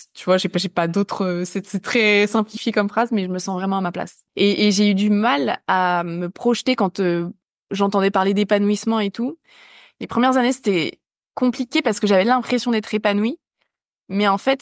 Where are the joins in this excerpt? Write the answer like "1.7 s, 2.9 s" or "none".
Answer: 4.2 s